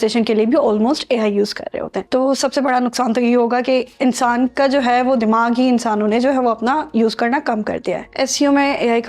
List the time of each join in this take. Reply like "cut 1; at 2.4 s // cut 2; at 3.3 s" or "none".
cut 1; at 2.0 s // cut 2; at 8.1 s